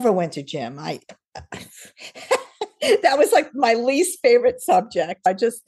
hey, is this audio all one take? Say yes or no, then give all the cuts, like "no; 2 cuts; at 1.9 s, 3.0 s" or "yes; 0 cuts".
yes; 0 cuts